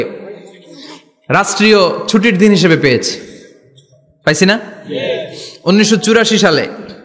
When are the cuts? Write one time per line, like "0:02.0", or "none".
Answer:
none